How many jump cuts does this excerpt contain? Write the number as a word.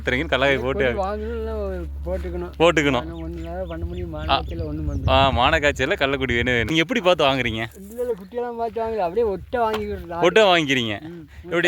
one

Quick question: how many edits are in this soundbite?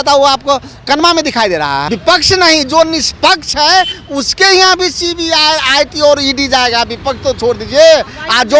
one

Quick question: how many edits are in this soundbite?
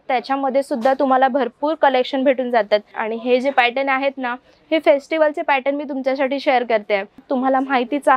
two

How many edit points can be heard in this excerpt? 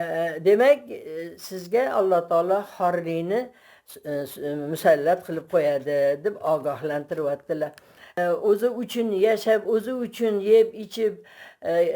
one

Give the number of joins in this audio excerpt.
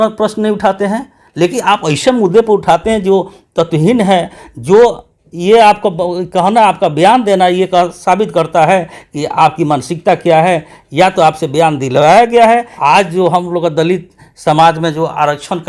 one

